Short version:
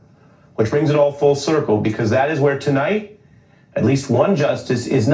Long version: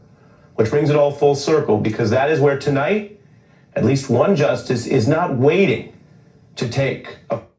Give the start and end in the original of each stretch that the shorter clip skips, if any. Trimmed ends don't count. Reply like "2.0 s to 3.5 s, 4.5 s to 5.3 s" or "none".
none